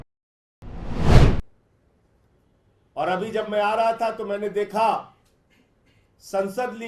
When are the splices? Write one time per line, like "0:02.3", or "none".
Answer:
0:01.5